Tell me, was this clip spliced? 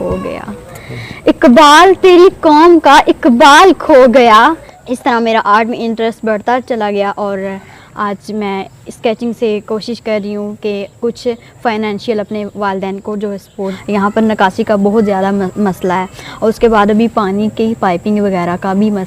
yes; 2 cuts; at 4.7 s, 13.8 s

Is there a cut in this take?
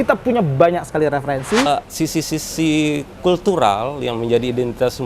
yes; 1 cut; at 1.7 s

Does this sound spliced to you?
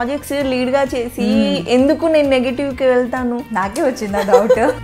no; 0 cuts

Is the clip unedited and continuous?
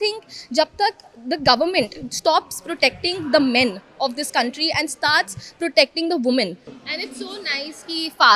no; 1 cut; at 6.7 s

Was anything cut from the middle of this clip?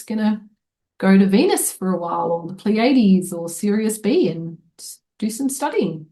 no; 0 cuts

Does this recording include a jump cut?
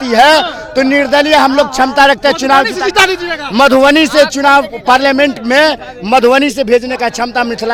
no; 0 cuts

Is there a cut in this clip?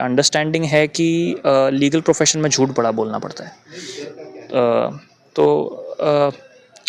no; 0 cuts

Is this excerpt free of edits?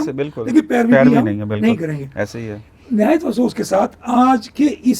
yes; 0 cuts

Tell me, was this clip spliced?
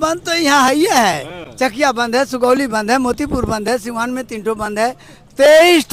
no; 0 cuts

